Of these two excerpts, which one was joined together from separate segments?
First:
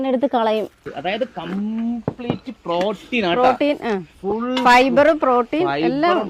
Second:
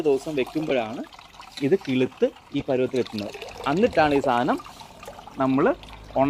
first; 1 cut; at 0.9 s

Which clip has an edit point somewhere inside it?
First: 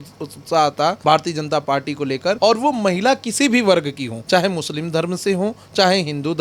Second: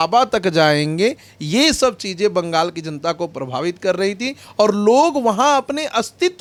first; 3 cuts; at 1.0 s, 2.4 s, 4.1 s

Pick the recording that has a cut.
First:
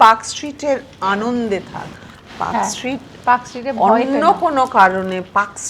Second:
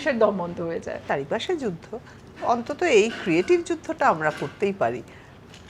second; 1 cut; at 0.9 s

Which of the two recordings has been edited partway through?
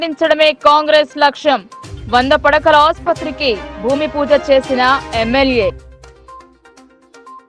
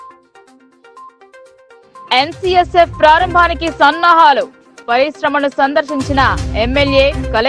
second; 1 cut; at 1.6 s

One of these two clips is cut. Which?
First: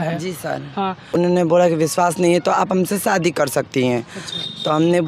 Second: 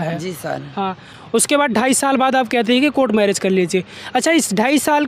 first; 1 cut; at 1.1 s

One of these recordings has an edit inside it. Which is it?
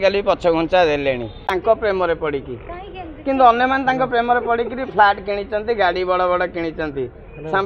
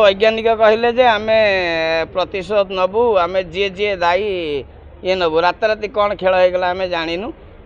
first; 1 cut; at 1.4 s

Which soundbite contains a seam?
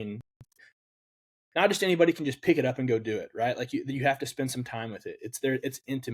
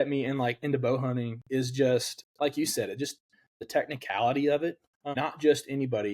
second; 3 cuts; at 2.2 s, 3.6 s, 4.9 s

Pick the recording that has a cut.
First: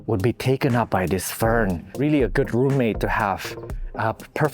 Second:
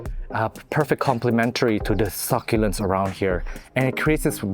first; 1 cut; at 1.8 s

